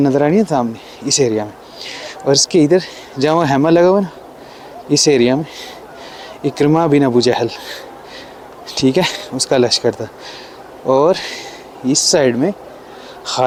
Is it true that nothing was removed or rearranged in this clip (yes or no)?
yes